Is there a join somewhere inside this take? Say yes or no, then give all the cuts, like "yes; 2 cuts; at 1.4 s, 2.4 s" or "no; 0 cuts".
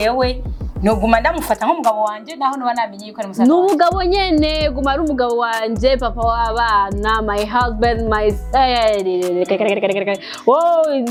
no; 0 cuts